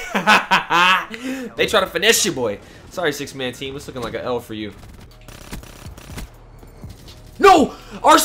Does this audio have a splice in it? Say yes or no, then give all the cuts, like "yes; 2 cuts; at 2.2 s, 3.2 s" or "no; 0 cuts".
yes; 1 cut; at 5.1 s